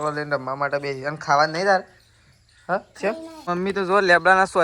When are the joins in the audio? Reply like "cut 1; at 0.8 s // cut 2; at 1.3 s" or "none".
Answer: cut 1; at 3.5 s